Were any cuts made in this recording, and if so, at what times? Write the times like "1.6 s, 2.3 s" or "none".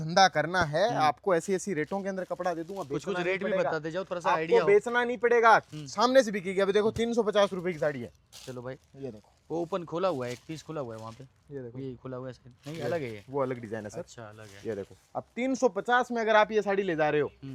none